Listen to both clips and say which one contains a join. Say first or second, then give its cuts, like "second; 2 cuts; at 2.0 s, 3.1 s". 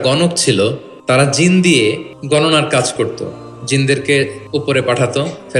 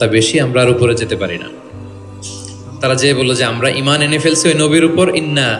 first; 3 cuts; at 0.9 s, 1.7 s, 4.4 s